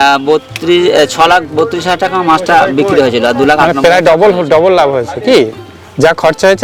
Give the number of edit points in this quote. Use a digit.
0